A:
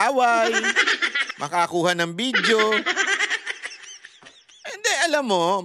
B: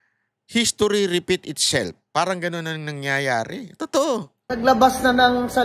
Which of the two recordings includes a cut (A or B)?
B